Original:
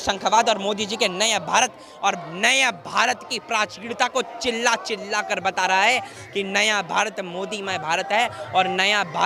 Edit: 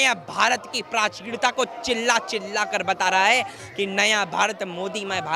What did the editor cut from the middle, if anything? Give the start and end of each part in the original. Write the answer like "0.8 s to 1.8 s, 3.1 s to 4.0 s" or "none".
none